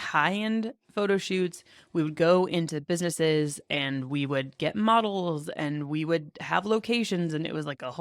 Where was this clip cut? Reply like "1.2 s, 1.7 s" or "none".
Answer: none